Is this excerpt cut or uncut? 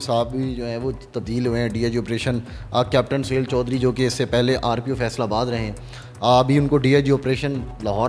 uncut